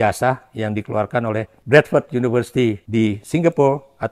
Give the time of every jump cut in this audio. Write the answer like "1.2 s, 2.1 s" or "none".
1.5 s, 2.8 s